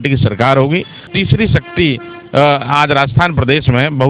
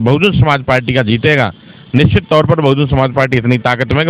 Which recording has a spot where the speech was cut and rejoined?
first; 1 cut; at 1.1 s

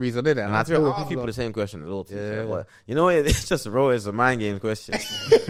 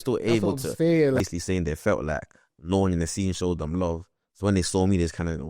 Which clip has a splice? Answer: second; 1 cut; at 1.2 s

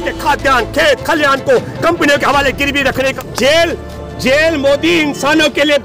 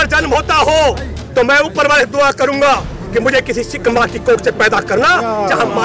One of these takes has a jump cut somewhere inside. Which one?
first; 1 cut; at 3.1 s

